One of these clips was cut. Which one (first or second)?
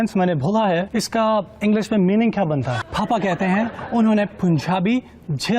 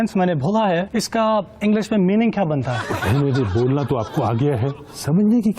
first